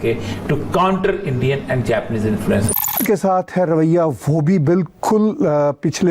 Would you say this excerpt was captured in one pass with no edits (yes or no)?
no